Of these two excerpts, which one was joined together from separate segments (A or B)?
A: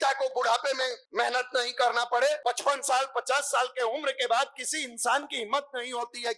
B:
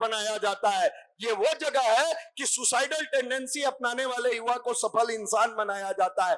A